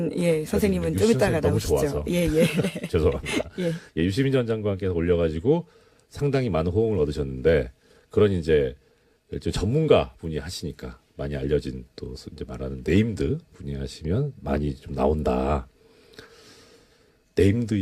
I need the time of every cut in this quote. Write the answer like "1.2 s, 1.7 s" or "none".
none